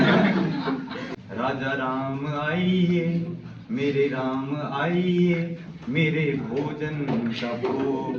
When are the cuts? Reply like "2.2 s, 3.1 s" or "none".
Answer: 1.1 s